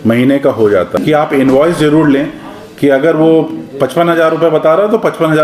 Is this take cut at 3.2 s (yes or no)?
no